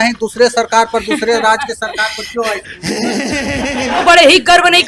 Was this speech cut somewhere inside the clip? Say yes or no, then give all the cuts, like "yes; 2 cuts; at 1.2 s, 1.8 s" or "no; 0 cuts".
yes; 2 cuts; at 2.6 s, 4.0 s